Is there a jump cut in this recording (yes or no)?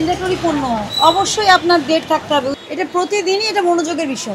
yes